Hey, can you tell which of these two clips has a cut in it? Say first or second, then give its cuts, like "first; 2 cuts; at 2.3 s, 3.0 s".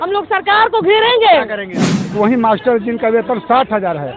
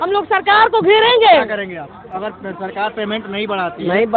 first; 1 cut; at 2.1 s